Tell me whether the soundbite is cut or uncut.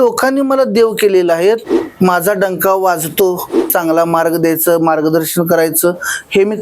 cut